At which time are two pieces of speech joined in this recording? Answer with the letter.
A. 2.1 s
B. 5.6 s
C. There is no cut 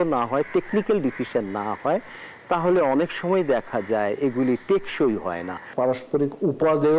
B